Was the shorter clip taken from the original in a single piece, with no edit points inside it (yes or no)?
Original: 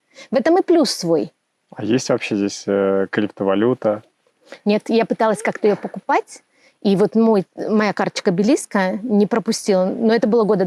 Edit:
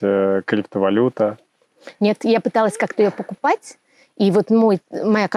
yes